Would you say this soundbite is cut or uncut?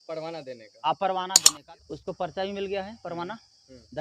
cut